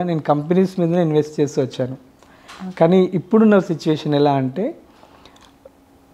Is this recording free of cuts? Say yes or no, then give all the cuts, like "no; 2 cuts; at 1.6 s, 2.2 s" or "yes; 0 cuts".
yes; 0 cuts